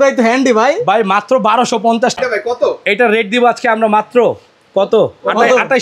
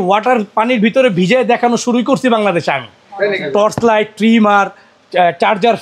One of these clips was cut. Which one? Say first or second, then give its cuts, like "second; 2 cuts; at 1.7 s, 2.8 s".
first; 1 cut; at 2.2 s